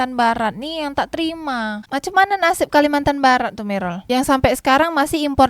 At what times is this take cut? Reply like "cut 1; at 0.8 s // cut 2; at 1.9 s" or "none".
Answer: cut 1; at 1.8 s